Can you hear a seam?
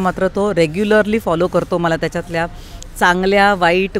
no; 0 cuts

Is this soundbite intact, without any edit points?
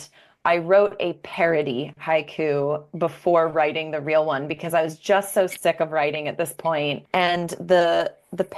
no; 1 cut; at 7.0 s

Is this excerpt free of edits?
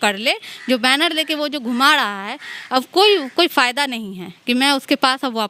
yes; 0 cuts

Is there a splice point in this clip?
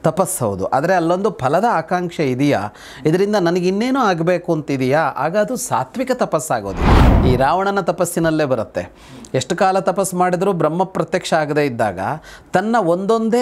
yes; 1 cut; at 7.0 s

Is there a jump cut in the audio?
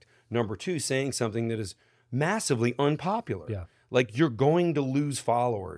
no; 0 cuts

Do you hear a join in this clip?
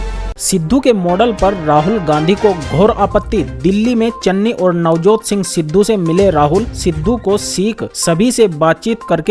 no; 0 cuts

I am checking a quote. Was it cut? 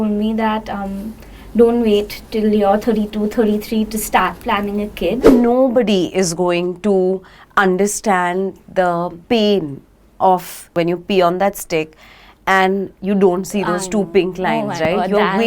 yes; 3 cuts; at 5.2 s, 9.2 s, 10.7 s

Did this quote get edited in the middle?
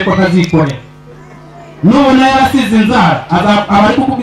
no; 0 cuts

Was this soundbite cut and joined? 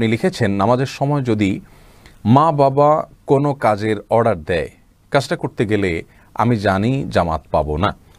no; 0 cuts

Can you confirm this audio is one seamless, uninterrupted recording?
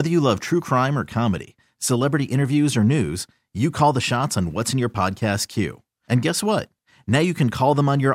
yes; 0 cuts

